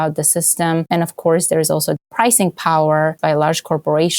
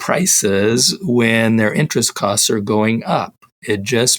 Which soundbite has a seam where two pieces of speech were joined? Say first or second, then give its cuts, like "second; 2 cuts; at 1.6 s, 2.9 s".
first; 3 cuts; at 0.9 s, 2.0 s, 3.2 s